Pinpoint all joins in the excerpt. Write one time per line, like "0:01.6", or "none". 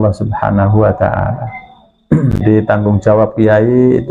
0:02.4